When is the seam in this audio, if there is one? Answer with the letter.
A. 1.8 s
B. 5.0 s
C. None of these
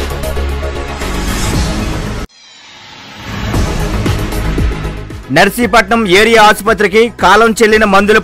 B